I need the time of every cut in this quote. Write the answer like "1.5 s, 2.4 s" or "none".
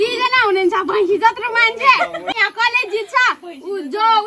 2.3 s

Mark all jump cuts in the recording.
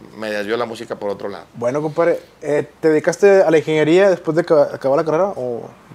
none

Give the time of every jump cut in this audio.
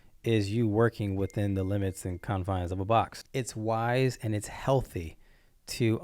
3.2 s

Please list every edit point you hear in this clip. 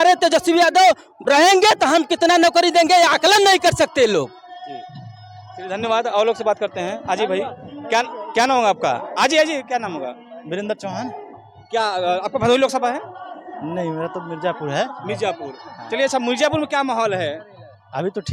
none

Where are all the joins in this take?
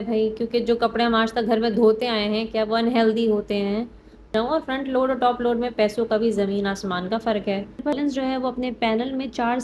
4.3 s, 8.0 s

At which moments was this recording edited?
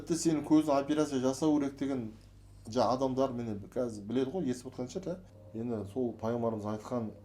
5.4 s

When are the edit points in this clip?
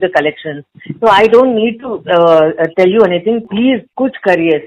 3.4 s

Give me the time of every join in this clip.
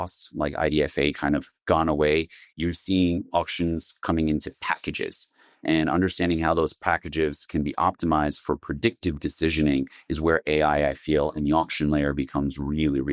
none

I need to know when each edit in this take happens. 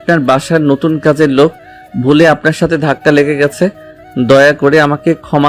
none

